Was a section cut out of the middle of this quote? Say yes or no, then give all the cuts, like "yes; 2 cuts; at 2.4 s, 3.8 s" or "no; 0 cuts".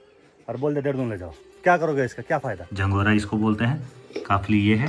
yes; 1 cut; at 2.6 s